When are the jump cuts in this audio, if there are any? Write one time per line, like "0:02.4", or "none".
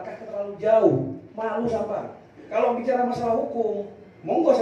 0:02.4